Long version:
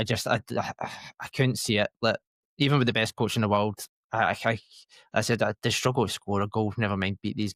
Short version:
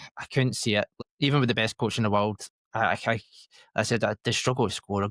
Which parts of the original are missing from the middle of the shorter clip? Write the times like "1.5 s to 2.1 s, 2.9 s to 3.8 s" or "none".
1.9 s to 2.3 s